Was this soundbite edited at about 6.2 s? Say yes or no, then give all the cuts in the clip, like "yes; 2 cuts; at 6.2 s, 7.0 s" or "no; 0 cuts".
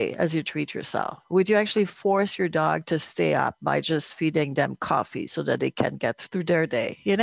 yes; 1 cut; at 6.2 s